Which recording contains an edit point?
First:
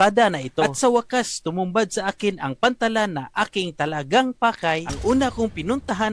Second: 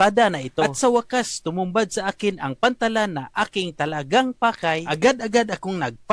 first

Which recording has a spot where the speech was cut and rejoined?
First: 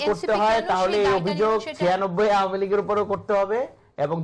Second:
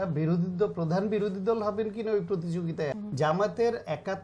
second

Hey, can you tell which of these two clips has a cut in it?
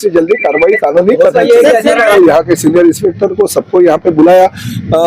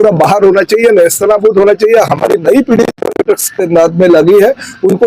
first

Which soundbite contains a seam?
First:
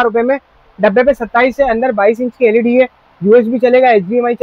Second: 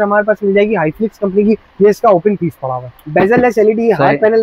second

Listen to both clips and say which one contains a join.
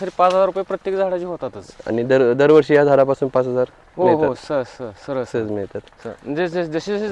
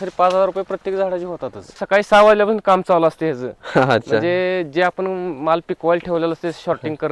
second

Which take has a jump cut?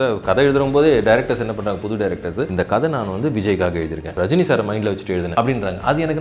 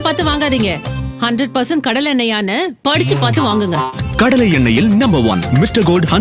first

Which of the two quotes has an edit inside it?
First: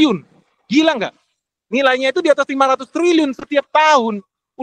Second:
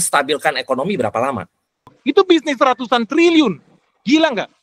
second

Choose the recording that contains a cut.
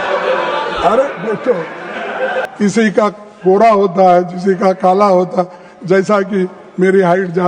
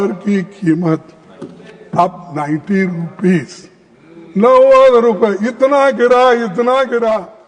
first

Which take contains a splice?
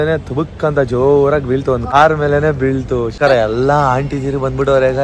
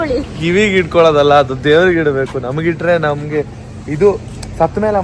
first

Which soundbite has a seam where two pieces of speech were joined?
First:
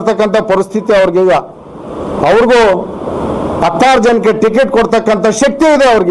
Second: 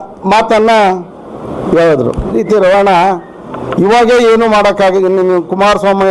second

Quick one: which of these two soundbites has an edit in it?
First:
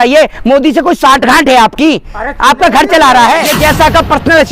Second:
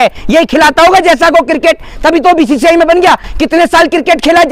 first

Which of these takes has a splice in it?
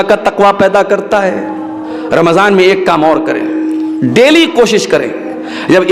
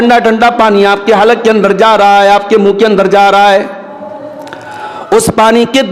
first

